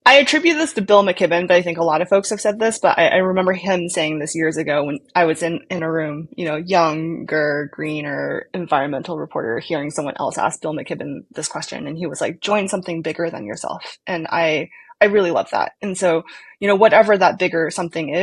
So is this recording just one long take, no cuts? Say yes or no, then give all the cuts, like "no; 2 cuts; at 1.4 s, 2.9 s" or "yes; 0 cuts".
yes; 0 cuts